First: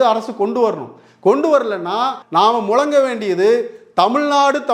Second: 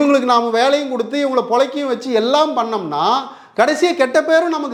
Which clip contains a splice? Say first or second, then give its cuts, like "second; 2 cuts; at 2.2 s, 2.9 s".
first; 1 cut; at 2.2 s